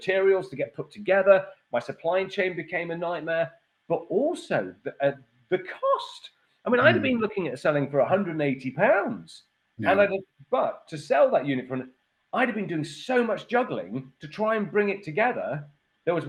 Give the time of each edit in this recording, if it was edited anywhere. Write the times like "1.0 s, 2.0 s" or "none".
none